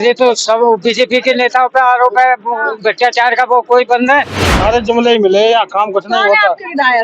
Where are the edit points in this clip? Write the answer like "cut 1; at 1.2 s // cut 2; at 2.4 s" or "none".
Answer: cut 1; at 4.4 s